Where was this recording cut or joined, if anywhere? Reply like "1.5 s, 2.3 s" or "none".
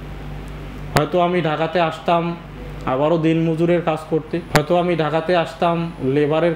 4.5 s

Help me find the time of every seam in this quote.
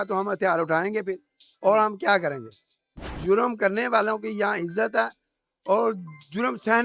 3.2 s

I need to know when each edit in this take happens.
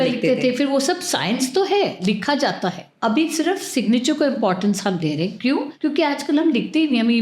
2.9 s, 5.7 s

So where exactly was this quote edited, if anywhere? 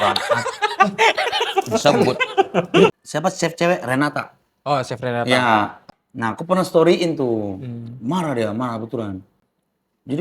2.9 s, 5.8 s

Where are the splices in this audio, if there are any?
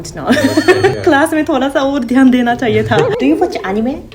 0.9 s, 3.1 s

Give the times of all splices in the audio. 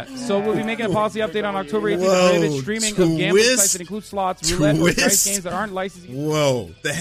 6.0 s

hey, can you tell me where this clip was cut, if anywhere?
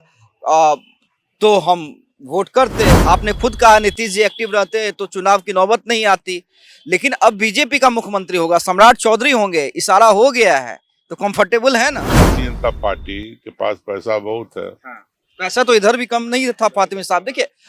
3.0 s, 12.1 s

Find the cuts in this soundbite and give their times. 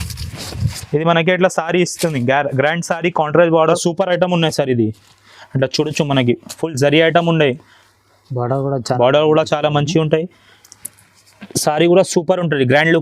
3.8 s

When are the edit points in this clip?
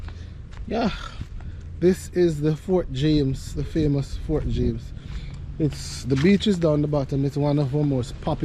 none

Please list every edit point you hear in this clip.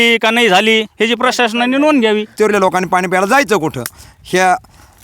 2.3 s

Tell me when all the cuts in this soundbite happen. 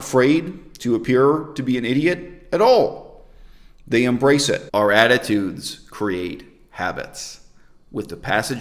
4.6 s

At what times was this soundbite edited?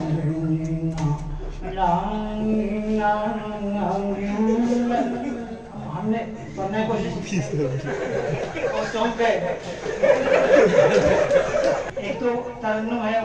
11.9 s

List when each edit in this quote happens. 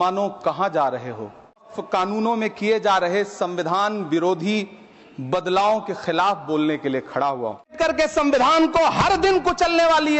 1.7 s, 7.7 s

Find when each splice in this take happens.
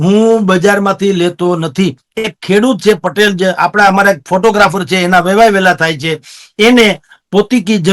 none

